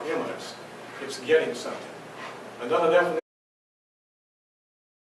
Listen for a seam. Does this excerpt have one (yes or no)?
no